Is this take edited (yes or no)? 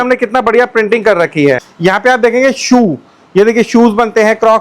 yes